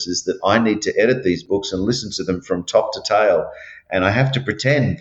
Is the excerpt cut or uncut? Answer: cut